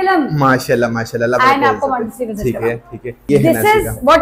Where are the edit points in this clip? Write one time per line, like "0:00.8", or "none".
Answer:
0:03.3